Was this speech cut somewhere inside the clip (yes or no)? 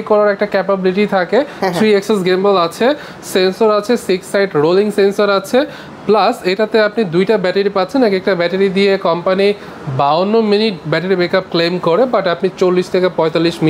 no